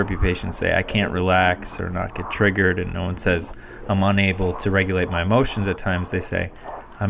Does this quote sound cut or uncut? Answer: uncut